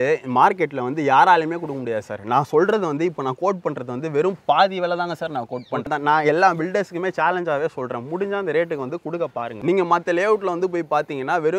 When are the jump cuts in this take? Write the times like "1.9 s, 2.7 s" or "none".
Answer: 5.9 s, 9.5 s